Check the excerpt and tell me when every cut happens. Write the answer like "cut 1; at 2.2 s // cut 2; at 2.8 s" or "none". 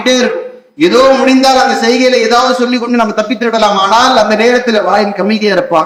none

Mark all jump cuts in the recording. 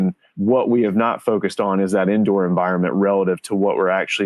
none

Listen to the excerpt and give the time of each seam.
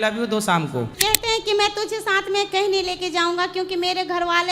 cut 1; at 0.9 s

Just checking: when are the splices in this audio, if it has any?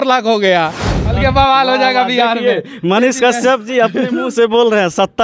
none

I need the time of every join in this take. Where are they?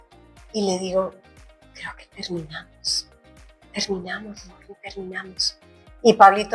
none

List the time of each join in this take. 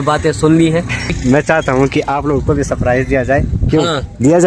cut 1; at 1.1 s

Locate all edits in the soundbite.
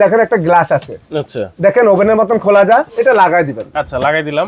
cut 1; at 2.9 s

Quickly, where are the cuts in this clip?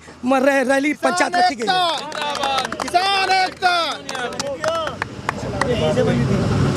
none

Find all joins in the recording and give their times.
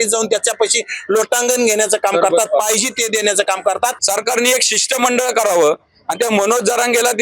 cut 1; at 4.0 s

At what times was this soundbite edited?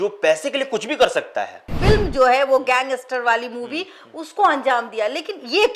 cut 1; at 1.7 s

